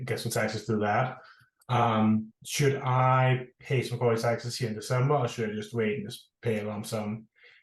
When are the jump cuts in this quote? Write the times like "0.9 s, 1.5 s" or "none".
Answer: 2.4 s

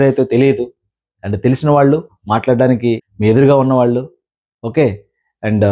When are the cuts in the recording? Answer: 3.1 s

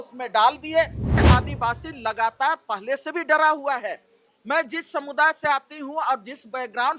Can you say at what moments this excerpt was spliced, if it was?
1.2 s

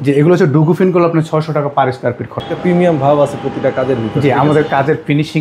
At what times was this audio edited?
2.5 s

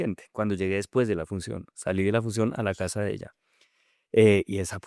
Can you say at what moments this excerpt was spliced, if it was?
none

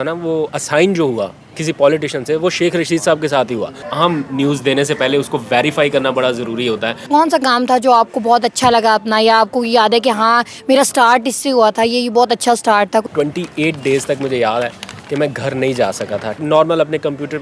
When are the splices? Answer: 3.8 s, 7.1 s, 13.1 s, 16.3 s

